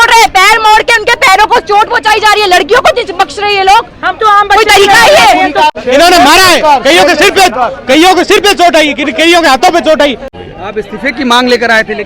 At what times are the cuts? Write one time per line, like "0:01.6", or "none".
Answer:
0:05.8
0:10.2

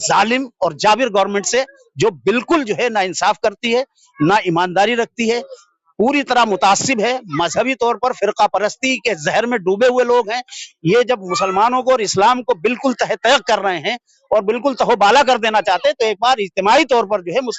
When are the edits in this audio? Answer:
none

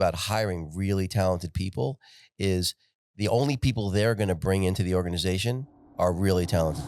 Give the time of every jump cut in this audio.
none

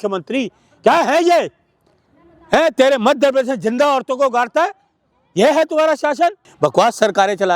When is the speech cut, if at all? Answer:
0:06.5

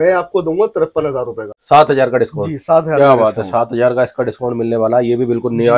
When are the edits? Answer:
0:01.5

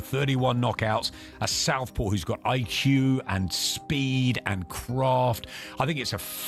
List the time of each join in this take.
none

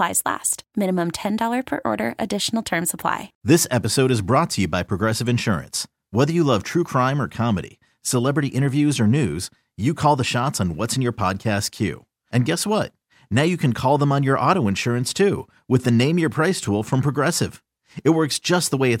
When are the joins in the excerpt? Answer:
0:03.3

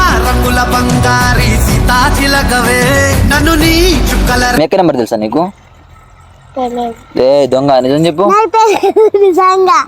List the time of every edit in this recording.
0:04.6

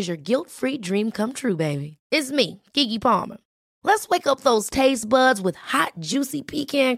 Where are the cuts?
none

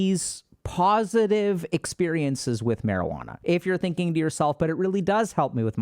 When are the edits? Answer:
0:03.3

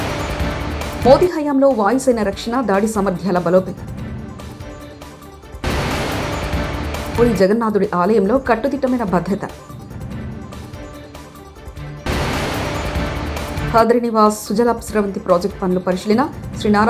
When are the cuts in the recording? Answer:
0:00.9

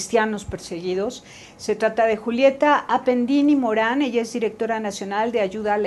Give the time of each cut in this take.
0:03.1

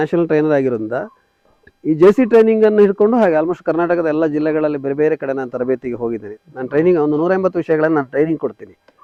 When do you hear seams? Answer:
none

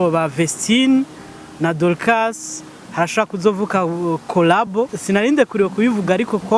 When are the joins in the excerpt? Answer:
0:05.0

